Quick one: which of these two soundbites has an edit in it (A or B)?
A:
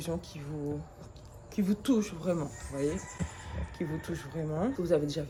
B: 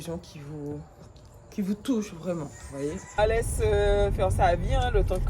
B